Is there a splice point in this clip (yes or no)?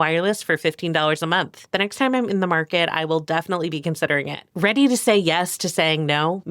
yes